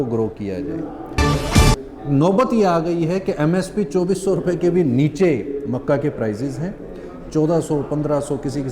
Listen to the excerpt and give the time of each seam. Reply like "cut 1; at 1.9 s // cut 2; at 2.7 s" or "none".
cut 1; at 1.4 s